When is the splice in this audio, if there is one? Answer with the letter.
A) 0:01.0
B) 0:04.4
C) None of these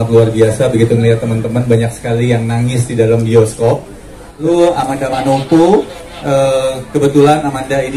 B